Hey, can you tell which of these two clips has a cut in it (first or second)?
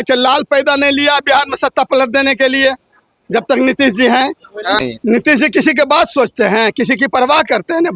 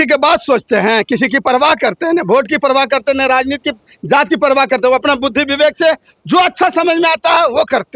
first